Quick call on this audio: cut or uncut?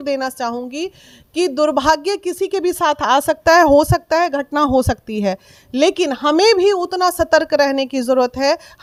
uncut